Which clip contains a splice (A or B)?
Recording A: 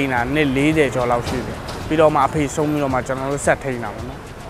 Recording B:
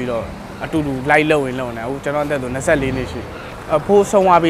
B